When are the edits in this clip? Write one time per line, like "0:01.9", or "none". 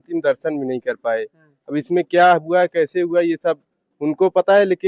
none